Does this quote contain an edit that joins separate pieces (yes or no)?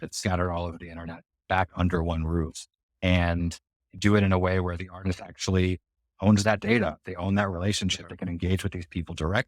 no